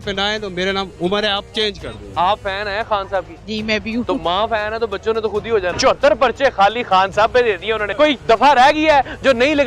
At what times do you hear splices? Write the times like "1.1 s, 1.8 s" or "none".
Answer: 2.1 s, 5.7 s, 7.9 s

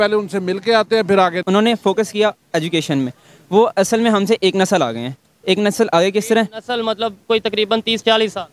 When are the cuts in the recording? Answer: 1.4 s

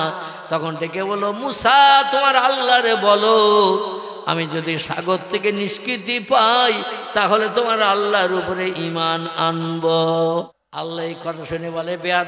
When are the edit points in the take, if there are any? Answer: 10.5 s

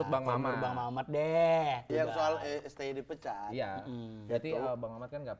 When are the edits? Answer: 1.9 s

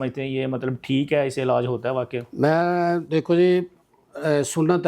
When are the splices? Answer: none

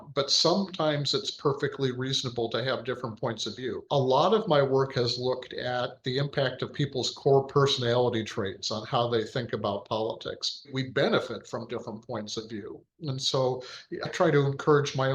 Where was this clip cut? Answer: 3.8 s, 10.7 s, 14.1 s

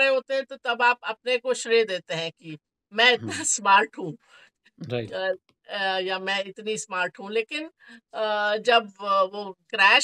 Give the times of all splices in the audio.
none

